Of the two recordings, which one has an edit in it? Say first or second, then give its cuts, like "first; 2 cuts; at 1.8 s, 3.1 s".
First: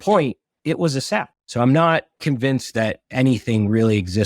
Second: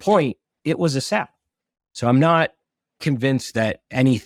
first; 2 cuts; at 1.4 s, 2.1 s